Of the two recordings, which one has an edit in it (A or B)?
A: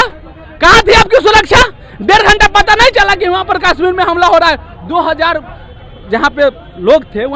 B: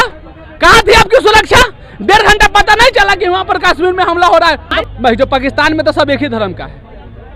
B